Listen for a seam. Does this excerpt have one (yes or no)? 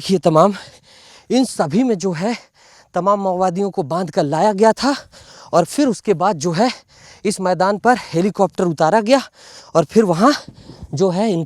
no